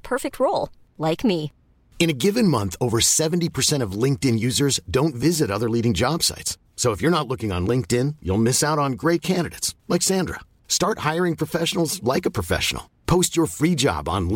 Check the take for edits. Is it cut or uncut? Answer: uncut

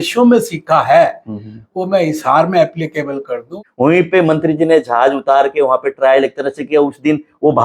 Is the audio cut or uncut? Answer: cut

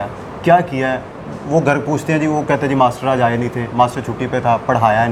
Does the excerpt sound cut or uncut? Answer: uncut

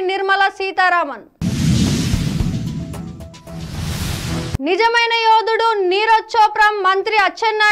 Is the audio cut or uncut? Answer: uncut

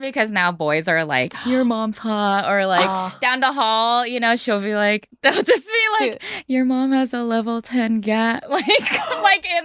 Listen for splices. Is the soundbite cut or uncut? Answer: cut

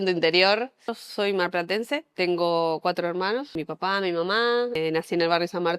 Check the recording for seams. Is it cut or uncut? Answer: cut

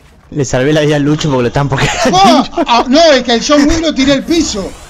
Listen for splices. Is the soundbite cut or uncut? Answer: uncut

